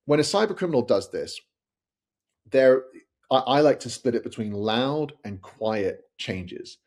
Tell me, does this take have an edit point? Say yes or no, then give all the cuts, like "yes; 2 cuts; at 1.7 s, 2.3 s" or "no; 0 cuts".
no; 0 cuts